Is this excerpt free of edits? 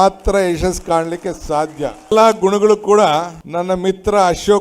no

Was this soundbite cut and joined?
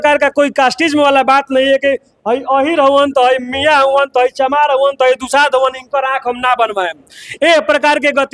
no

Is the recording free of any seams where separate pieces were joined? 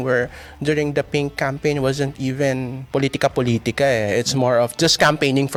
yes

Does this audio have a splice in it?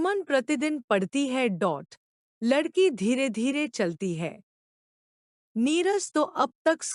no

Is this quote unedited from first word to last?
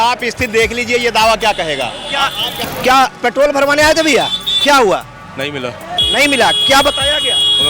no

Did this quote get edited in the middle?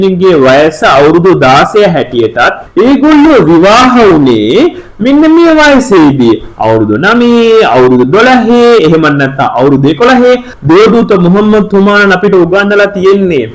yes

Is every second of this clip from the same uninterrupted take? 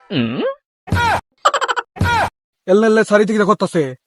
no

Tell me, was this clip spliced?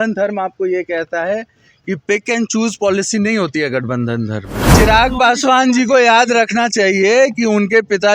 yes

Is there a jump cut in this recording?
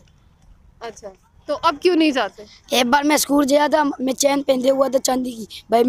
yes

